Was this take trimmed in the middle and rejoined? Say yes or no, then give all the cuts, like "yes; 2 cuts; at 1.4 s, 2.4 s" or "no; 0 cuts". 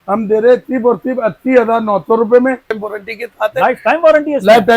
yes; 1 cut; at 2.8 s